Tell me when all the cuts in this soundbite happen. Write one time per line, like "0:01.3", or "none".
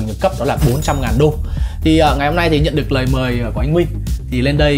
none